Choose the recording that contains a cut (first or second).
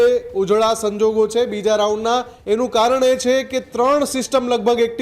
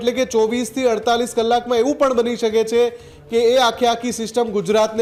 first